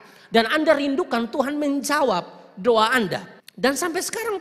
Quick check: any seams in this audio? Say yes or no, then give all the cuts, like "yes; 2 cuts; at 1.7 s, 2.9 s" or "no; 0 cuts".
yes; 1 cut; at 3.4 s